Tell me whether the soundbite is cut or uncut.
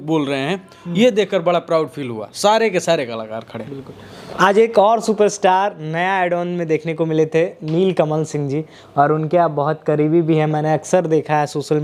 uncut